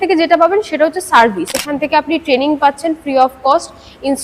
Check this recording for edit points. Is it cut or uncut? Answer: cut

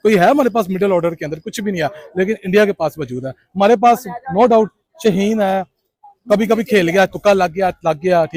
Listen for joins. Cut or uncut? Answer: uncut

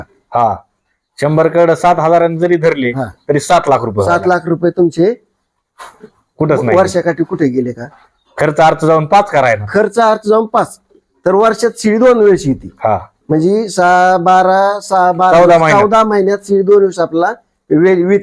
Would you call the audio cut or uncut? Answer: uncut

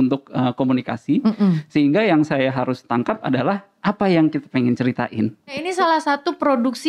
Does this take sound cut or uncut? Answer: cut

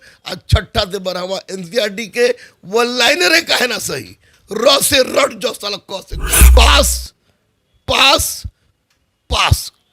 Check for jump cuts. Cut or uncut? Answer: cut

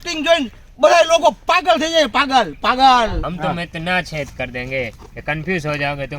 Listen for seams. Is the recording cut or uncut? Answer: cut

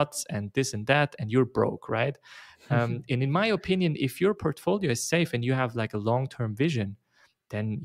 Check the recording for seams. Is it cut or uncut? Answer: uncut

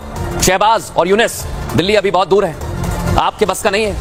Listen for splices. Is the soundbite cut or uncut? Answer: uncut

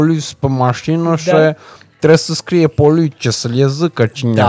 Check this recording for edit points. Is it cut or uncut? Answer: uncut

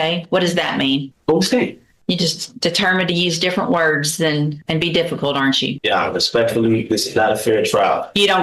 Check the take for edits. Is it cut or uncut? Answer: cut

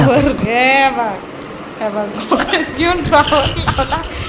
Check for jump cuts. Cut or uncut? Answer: uncut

